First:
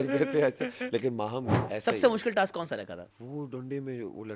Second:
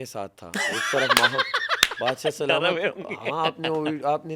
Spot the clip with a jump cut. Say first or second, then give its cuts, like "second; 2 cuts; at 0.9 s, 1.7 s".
first; 2 cuts; at 1.6 s, 3.1 s